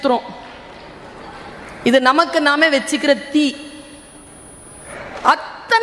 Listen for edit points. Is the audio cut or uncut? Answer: cut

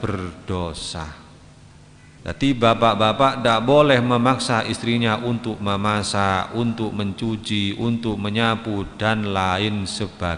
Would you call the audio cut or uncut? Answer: cut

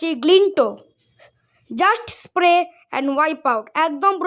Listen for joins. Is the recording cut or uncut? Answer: uncut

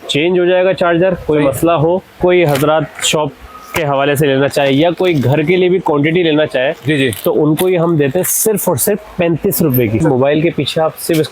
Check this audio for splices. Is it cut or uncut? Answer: cut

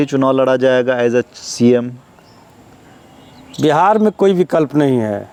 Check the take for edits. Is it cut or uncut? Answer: uncut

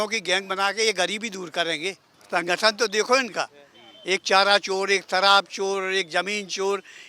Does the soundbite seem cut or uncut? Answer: cut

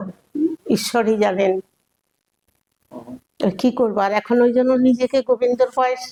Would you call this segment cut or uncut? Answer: uncut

